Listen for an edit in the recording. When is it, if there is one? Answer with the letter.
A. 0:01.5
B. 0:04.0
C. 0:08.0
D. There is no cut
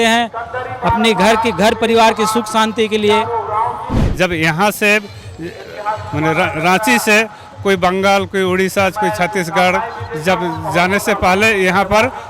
B